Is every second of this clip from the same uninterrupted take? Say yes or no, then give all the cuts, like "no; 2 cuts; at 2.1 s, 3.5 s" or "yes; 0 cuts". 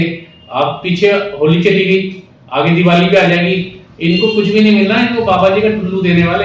yes; 0 cuts